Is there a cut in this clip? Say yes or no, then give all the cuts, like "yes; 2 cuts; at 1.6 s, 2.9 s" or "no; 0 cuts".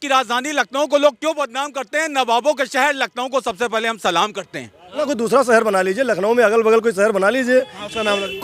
yes; 1 cut; at 5.1 s